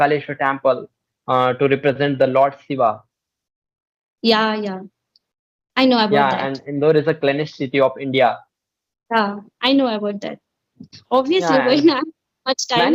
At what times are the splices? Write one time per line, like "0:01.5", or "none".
none